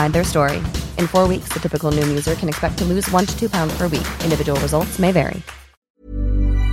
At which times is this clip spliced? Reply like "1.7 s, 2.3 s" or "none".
5.8 s